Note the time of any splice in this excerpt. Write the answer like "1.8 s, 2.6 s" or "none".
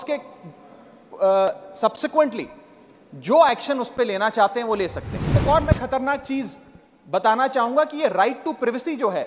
5.4 s